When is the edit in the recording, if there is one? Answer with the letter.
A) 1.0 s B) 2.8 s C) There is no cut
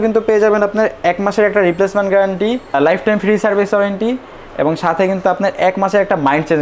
B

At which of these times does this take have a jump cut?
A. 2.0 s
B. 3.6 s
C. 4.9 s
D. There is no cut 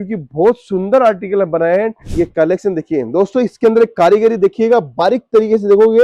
A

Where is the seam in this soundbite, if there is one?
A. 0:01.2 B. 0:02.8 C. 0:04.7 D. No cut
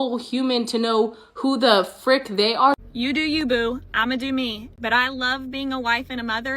B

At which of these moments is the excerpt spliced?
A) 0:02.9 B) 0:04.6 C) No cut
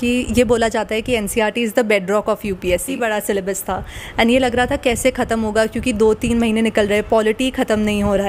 A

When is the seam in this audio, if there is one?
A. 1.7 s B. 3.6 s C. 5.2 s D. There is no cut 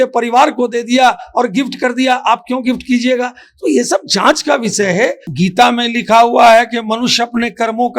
C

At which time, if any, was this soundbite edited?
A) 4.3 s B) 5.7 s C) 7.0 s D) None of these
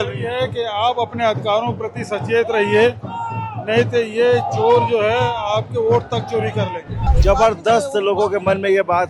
C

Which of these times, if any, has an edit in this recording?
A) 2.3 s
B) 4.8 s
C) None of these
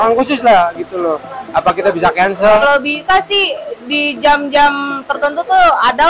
A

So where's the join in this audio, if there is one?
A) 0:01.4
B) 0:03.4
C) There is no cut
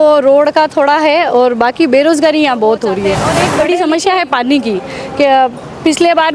B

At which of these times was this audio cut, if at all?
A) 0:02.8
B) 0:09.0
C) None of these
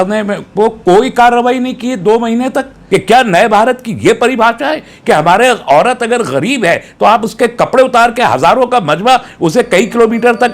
A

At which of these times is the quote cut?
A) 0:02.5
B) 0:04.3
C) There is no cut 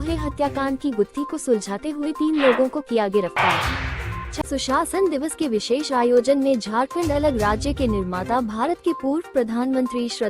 B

